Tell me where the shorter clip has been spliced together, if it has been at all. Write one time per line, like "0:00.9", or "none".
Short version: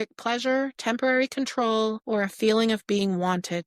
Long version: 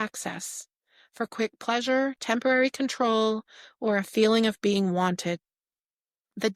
0:02.0